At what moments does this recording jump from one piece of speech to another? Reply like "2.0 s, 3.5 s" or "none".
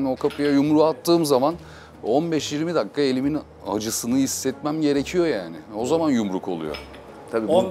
none